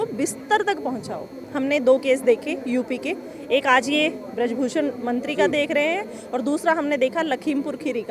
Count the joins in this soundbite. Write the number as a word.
one